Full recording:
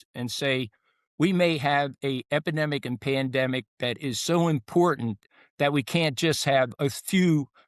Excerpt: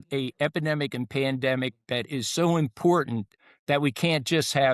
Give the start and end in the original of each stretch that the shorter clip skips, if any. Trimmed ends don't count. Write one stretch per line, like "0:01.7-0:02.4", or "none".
none